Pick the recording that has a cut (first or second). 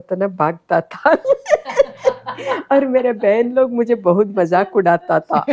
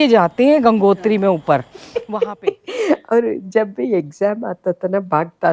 second